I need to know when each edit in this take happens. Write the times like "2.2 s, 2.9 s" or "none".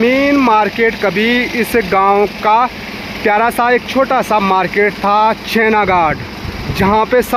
none

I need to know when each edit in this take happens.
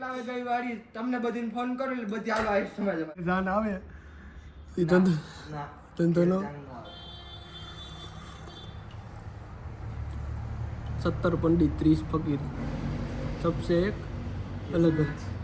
3.2 s

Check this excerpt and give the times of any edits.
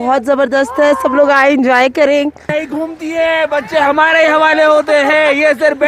2.6 s

